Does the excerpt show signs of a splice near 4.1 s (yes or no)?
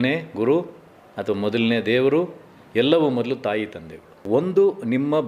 yes